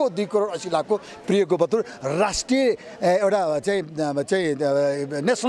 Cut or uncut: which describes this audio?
uncut